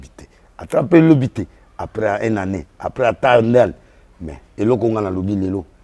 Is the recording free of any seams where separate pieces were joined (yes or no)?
yes